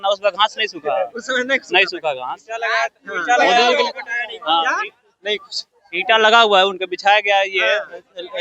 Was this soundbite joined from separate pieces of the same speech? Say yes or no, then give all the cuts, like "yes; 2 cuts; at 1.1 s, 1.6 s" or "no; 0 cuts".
no; 0 cuts